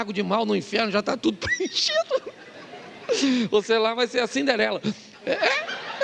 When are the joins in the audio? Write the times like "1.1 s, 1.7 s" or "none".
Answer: none